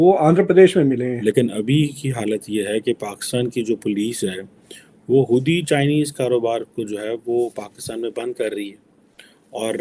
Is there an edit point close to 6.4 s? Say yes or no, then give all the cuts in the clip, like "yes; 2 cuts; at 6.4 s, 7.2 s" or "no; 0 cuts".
no; 1 cut; at 1.2 s